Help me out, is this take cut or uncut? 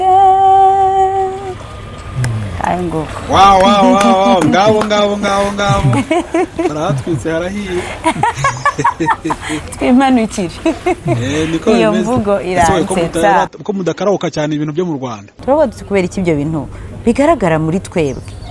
cut